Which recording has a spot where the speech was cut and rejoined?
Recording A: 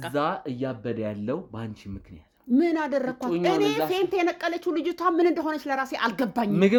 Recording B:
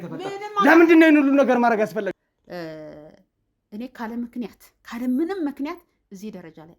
B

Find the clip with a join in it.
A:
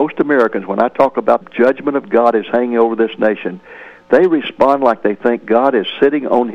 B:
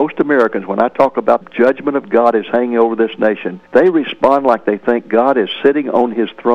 B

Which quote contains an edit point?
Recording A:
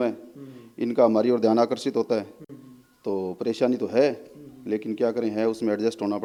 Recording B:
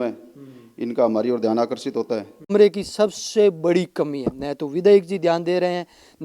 B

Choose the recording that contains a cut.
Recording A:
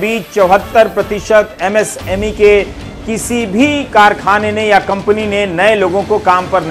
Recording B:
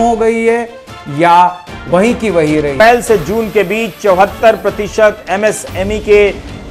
B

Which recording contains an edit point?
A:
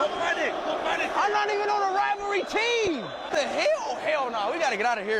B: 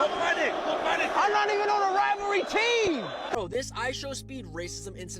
B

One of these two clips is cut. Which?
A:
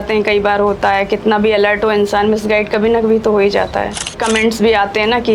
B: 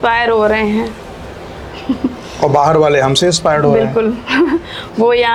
A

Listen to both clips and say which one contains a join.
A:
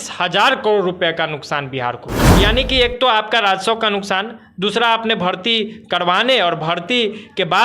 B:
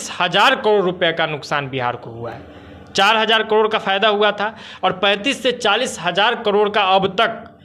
A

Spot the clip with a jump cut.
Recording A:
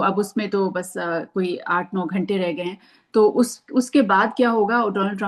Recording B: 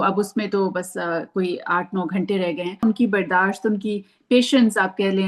B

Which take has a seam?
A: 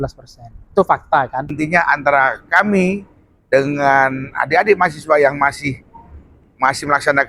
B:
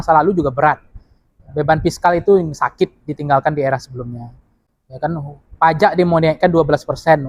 A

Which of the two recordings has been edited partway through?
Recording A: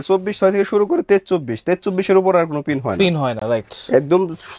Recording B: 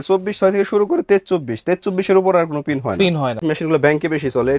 B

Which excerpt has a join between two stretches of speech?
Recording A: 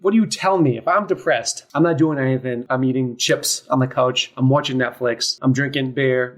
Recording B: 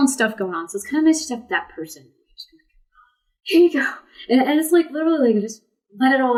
A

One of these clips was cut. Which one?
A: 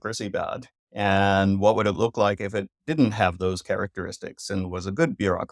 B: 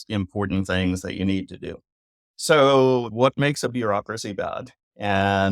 B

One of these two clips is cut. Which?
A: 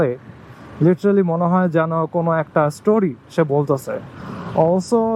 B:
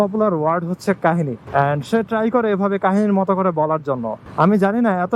B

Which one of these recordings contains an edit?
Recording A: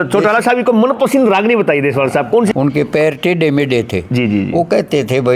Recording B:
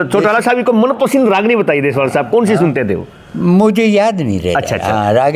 A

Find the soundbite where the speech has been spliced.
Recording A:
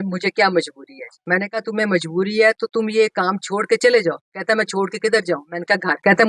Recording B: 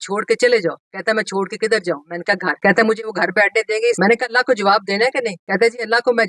B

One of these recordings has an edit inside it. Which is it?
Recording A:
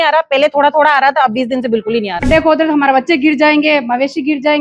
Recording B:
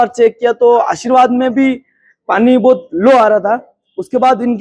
A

